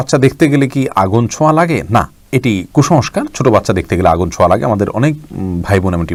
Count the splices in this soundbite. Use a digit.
0